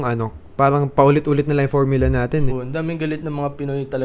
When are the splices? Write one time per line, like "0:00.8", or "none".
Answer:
0:02.6